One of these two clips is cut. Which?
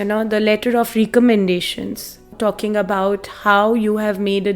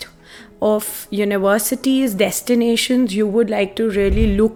first; 1 cut; at 2.3 s

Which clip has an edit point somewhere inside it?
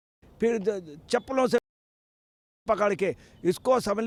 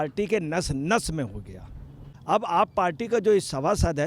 second; 1 cut; at 2.1 s

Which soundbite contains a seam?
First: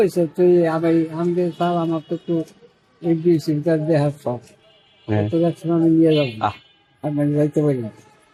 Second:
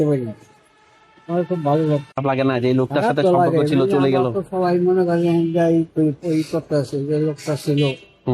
second; 1 cut; at 2.1 s

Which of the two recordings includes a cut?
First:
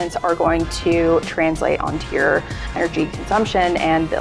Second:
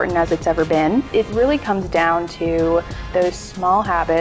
second; 1 cut; at 1.1 s

